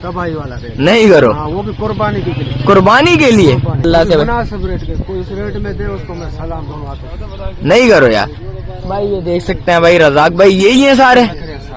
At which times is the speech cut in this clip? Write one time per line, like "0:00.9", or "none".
0:03.8